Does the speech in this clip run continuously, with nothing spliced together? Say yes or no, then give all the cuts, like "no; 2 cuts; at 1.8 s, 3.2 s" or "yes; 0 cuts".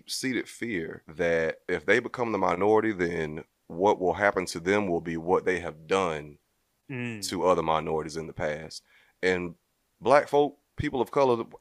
no; 2 cuts; at 1.0 s, 1.6 s